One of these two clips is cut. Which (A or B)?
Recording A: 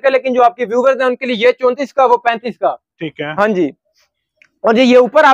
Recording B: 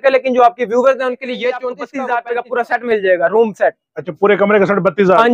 B